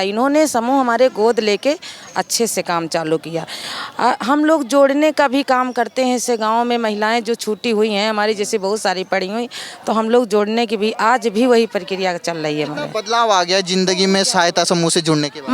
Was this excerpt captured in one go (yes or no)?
yes